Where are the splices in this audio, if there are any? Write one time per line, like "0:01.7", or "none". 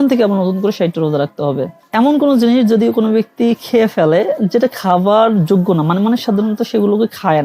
0:01.8